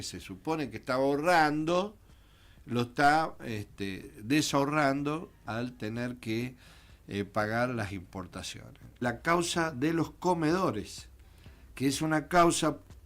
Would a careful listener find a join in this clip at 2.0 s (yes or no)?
no